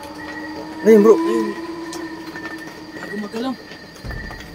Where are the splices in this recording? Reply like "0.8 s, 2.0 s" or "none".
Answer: none